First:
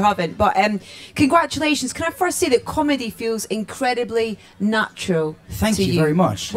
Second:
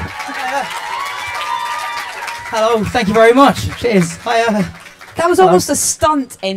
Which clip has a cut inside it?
first; 1 cut; at 2.6 s

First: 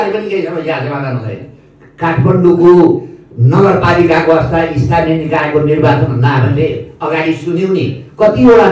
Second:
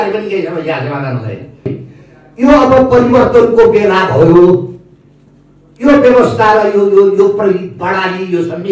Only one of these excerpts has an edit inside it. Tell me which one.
second; 1 cut; at 1.8 s

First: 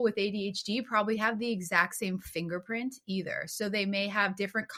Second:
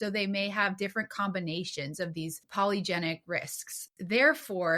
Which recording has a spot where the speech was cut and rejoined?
second; 2 cuts; at 2.4 s, 3.9 s

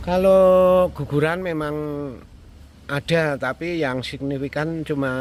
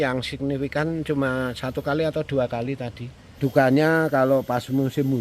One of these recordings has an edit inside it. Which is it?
second; 1 cut; at 3.3 s

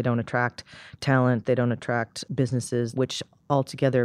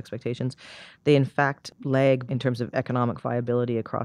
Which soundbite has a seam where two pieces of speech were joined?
first; 1 cut; at 2.9 s

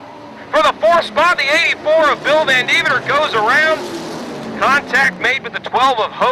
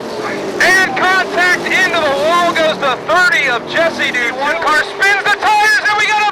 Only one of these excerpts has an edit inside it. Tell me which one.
second; 1 cut; at 4.3 s

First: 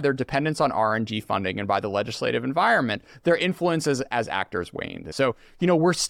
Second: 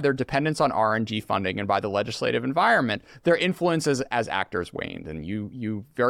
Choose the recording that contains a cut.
first; 1 cut; at 5.0 s

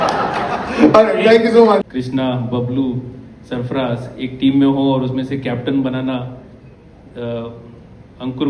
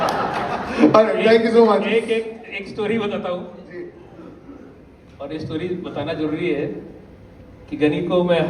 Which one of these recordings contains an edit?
first; 1 cut; at 1.8 s

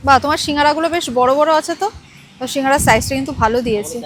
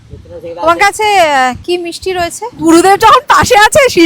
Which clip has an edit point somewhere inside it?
second; 1 cut; at 2.5 s

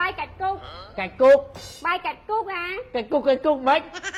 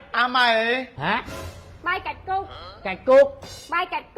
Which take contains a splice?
second; 1 cut; at 0.9 s

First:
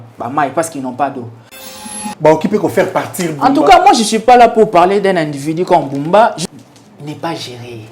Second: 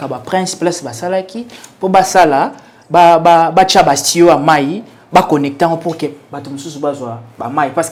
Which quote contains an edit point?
first; 2 cuts; at 1.9 s, 6.4 s

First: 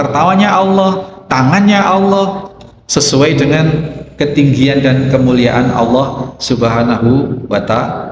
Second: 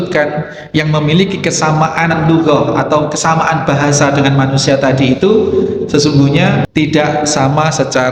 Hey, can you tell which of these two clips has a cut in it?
second; 2 cuts; at 2.2 s, 6.7 s

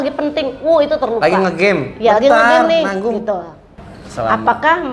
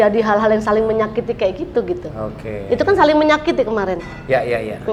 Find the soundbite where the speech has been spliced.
first; 1 cut; at 3.7 s

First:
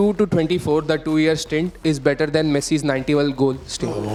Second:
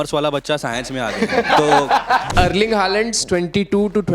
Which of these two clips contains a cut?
second; 1 cut; at 2.2 s

